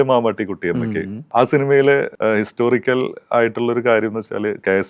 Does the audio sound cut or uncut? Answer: cut